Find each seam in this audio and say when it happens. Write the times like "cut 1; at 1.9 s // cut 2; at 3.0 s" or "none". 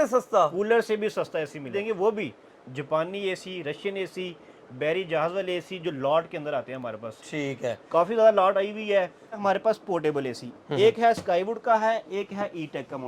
cut 1; at 1.7 s // cut 2; at 9.4 s